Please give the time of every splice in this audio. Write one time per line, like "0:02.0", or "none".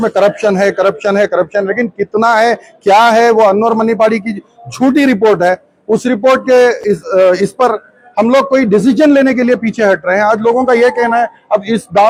none

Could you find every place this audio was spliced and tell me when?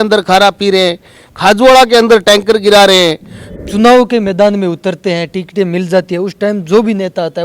0:03.5

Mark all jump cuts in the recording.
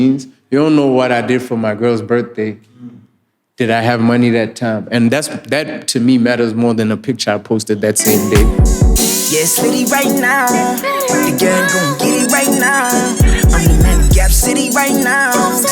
0:08.5

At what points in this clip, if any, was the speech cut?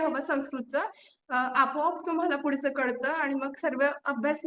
none

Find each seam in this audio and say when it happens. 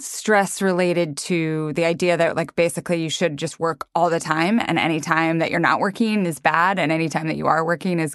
none

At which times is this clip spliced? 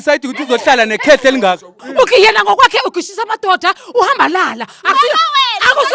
0:01.8

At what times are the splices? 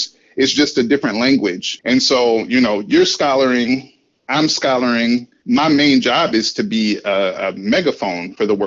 0:01.7
0:05.3

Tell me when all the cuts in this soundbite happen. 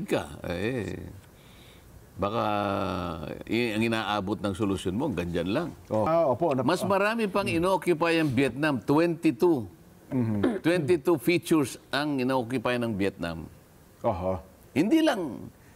0:06.1

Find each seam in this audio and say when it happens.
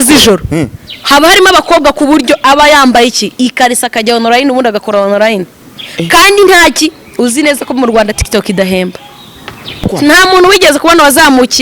0:09.9

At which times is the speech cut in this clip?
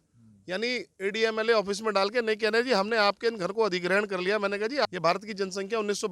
0:04.9

